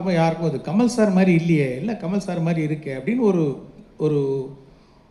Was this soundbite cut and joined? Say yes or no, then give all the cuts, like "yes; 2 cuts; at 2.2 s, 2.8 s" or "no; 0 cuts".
no; 0 cuts